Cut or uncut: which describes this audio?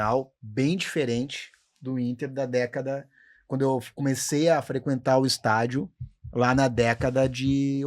uncut